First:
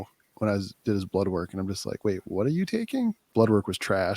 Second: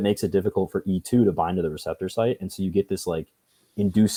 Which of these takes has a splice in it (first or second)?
first